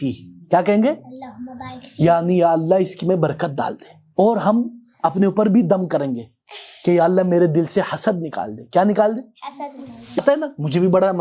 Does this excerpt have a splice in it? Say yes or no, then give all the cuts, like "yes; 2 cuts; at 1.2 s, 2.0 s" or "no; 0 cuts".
yes; 1 cut; at 10.2 s